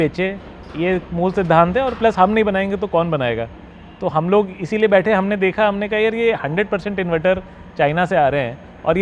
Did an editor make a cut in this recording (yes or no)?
no